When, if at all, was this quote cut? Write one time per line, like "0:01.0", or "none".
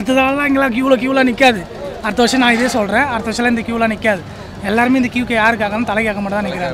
none